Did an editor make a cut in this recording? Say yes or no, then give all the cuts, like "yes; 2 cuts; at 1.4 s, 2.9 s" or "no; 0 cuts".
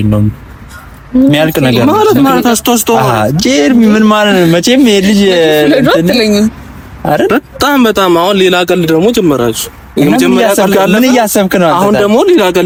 no; 0 cuts